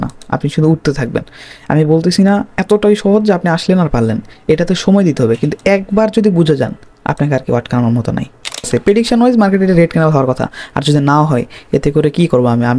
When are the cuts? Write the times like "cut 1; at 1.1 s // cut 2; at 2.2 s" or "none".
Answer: cut 1; at 8.7 s